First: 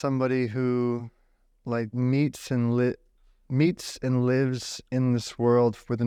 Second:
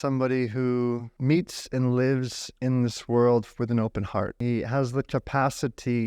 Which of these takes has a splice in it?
second; 2 cuts; at 1.1 s, 4.4 s

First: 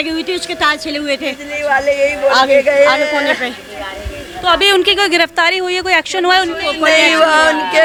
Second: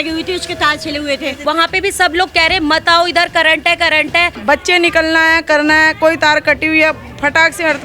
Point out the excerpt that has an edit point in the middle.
second; 2 cuts; at 1.4 s, 4.4 s

